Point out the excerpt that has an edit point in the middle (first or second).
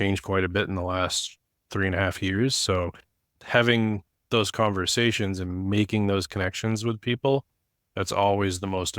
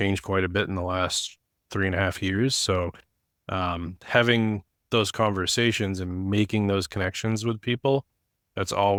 first